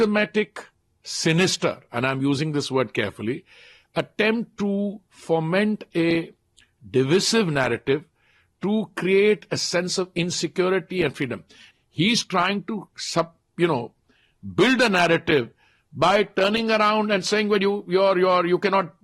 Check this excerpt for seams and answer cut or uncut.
cut